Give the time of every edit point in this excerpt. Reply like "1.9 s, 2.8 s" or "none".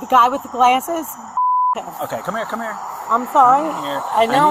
none